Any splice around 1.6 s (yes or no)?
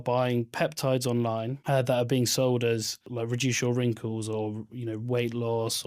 yes